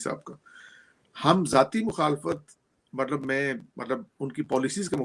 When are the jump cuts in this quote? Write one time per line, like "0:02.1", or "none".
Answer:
none